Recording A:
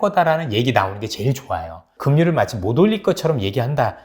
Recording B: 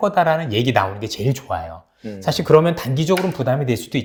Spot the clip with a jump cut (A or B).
A